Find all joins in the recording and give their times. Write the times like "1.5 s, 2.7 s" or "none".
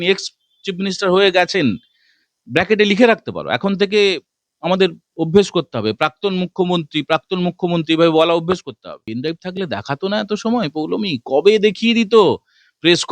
9.1 s